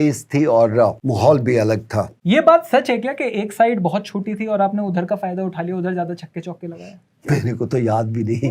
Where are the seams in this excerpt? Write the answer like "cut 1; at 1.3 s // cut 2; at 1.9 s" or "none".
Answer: cut 1; at 1.0 s // cut 2; at 2.1 s

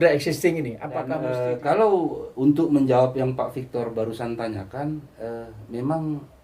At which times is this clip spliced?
cut 1; at 1.1 s

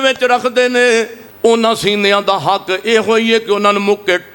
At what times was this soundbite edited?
cut 1; at 1.2 s

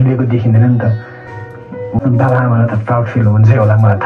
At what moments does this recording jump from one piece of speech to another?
cut 1; at 2.0 s

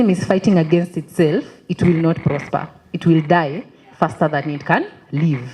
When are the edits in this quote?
none

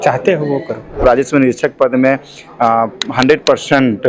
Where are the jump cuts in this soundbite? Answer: cut 1; at 1.0 s

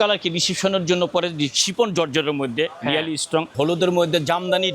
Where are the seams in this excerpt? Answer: cut 1; at 3.5 s

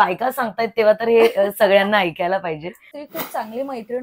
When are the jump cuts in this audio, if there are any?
cut 1; at 3.0 s

